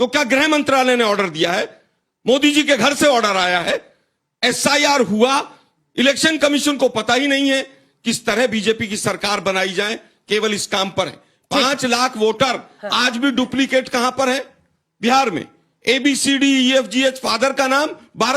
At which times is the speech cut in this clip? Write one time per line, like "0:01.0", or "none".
none